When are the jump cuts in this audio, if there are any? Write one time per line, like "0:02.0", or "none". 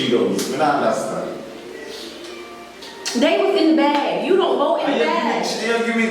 0:02.8